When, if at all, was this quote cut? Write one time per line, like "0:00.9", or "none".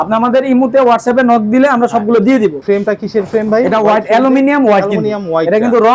0:02.6